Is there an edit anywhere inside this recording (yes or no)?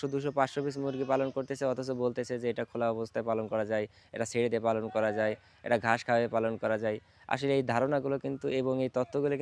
no